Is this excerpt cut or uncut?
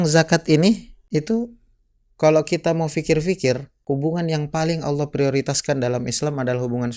cut